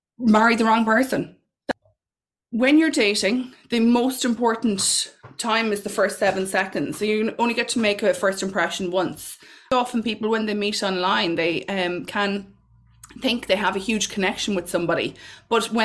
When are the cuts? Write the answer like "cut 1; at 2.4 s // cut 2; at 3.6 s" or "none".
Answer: cut 1; at 1.6 s // cut 2; at 9.7 s